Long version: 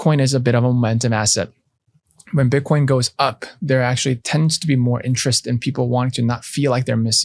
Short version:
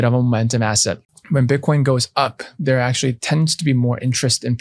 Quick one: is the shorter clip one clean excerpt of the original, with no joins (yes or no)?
no